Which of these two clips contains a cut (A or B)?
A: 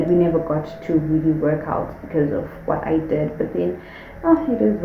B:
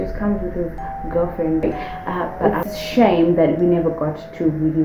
B